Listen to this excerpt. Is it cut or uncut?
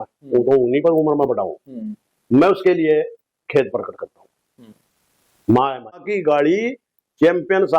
cut